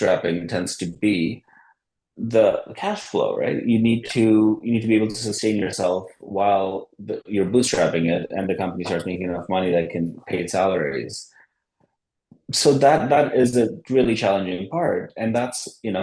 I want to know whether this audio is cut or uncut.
uncut